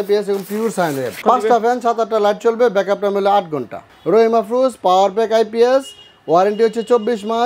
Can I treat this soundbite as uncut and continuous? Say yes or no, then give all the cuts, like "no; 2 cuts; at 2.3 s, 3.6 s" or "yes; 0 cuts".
no; 2 cuts; at 1.2 s, 3.8 s